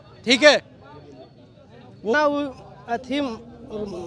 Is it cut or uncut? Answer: cut